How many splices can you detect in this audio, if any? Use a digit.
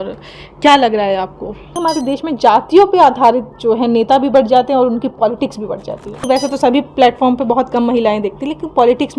2